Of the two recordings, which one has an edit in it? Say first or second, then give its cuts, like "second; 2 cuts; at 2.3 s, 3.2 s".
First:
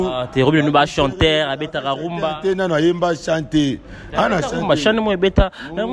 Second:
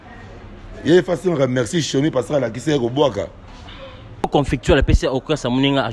second; 1 cut; at 4.2 s